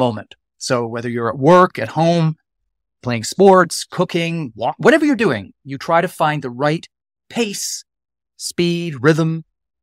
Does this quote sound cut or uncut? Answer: uncut